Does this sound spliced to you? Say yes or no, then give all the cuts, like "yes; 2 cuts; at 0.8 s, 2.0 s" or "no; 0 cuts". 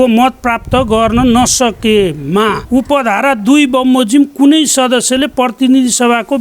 yes; 1 cut; at 2.6 s